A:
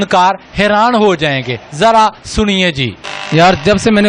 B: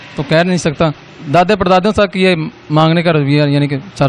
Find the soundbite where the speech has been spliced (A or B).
B